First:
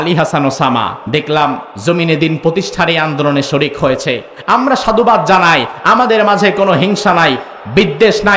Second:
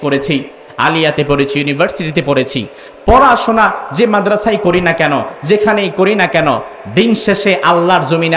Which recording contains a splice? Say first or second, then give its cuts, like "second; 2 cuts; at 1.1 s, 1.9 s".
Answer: first; 2 cuts; at 1.0 s, 1.7 s